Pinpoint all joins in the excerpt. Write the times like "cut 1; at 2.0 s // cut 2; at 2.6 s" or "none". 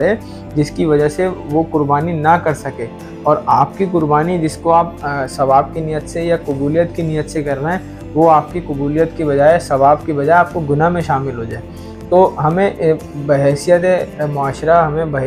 none